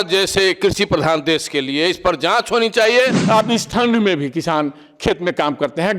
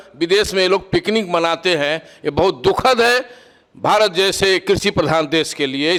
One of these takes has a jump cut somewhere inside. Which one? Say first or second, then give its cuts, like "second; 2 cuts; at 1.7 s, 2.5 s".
first; 1 cut; at 3.2 s